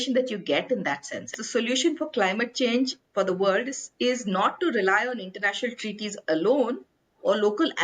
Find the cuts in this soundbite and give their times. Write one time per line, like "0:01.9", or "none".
0:01.4